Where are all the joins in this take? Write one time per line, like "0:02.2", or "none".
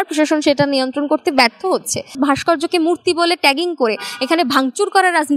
0:02.1